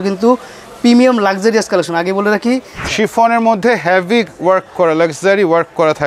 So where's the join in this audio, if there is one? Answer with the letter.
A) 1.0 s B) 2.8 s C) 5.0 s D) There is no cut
B